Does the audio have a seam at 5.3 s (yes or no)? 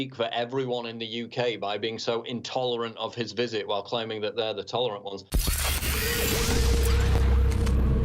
yes